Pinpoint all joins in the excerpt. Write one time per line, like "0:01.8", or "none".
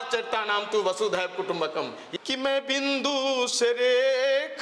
0:02.0